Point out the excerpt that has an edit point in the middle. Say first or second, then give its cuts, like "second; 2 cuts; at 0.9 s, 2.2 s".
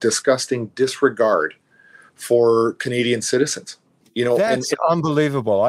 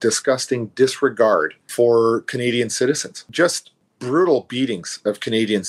second; 2 cuts; at 1.6 s, 3.2 s